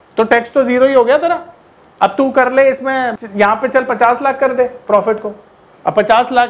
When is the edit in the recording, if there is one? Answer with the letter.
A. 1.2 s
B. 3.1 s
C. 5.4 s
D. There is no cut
B